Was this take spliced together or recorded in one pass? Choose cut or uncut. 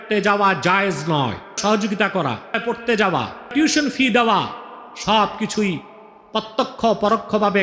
cut